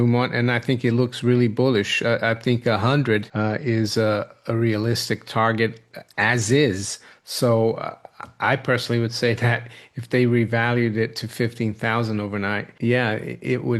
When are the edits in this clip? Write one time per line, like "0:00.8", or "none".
0:03.3